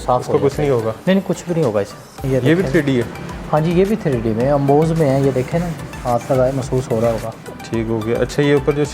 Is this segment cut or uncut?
cut